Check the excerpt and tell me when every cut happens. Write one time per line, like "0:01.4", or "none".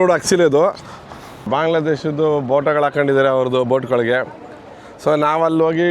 0:01.5